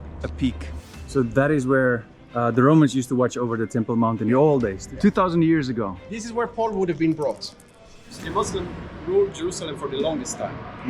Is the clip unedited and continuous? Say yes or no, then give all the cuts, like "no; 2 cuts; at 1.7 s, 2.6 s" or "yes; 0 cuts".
no; 2 cuts; at 1.1 s, 8.1 s